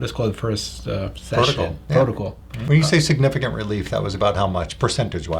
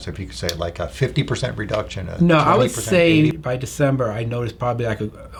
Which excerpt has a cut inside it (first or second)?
first